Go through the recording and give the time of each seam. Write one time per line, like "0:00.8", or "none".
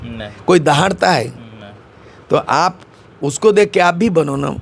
none